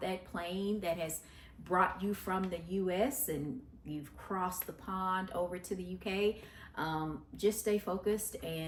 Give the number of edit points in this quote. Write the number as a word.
zero